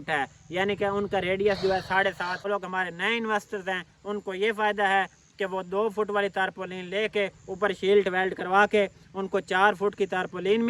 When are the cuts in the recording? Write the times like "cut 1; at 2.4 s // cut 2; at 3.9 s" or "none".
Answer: cut 1; at 2.5 s